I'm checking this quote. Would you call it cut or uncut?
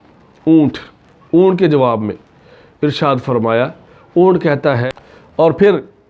cut